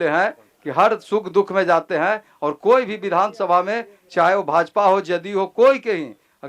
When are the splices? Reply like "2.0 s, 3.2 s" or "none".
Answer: none

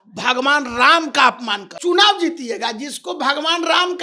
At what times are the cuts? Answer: 1.7 s

